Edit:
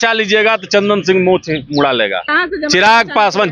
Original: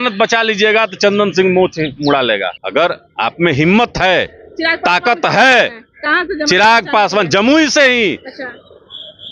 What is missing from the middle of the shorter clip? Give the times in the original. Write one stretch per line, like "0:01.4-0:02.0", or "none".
0:02.5-0:06.0